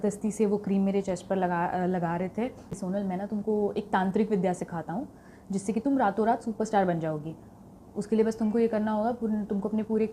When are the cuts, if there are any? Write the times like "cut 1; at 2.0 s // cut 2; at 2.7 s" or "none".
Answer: cut 1; at 2.7 s